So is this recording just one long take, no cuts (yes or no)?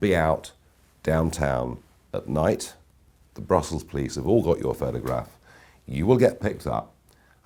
yes